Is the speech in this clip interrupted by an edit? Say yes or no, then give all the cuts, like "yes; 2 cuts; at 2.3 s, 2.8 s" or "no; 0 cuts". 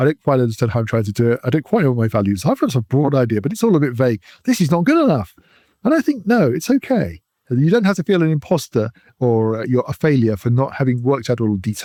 no; 0 cuts